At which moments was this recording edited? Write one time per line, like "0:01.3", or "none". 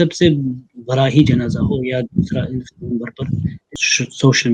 0:03.6